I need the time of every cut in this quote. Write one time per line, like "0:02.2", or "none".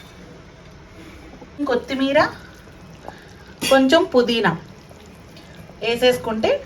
0:01.6